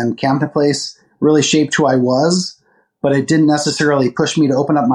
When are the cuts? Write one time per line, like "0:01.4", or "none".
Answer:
none